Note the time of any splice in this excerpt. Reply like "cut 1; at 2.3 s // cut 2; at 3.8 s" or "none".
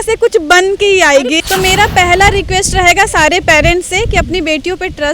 cut 1; at 1.4 s